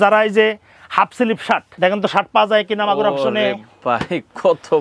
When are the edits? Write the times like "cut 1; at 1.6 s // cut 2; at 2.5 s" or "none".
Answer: cut 1; at 1.7 s